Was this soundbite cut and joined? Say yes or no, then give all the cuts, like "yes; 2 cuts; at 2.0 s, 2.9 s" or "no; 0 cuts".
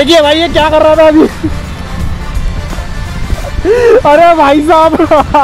no; 0 cuts